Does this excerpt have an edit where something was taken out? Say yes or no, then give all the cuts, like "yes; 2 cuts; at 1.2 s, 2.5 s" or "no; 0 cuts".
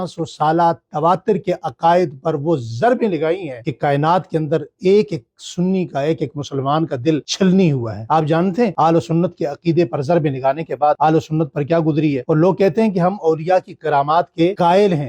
no; 0 cuts